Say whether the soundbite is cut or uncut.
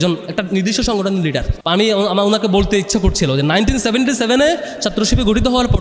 cut